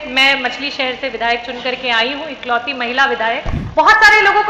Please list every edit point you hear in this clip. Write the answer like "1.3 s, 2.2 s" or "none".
3.6 s